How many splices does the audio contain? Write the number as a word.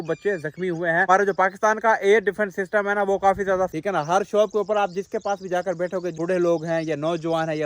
three